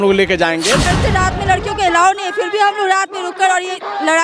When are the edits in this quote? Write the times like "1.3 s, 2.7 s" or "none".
0.9 s